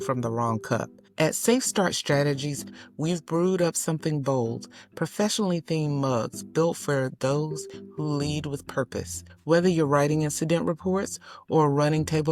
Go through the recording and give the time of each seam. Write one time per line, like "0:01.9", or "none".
none